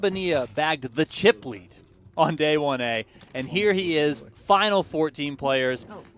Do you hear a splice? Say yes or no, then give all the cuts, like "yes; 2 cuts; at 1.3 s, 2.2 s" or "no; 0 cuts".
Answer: no; 0 cuts